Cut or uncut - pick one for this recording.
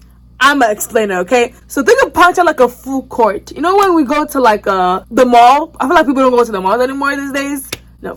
uncut